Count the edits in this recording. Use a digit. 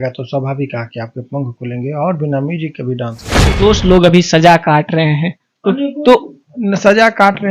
1